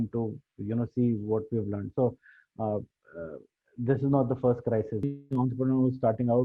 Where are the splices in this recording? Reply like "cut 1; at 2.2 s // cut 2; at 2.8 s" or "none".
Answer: cut 1; at 5.1 s